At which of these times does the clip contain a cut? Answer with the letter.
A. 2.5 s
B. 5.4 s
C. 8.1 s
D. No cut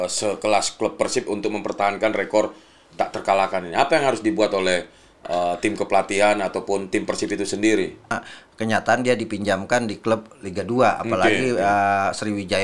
C